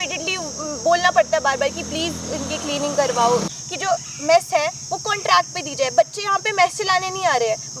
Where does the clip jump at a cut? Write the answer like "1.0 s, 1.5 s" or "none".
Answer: 3.5 s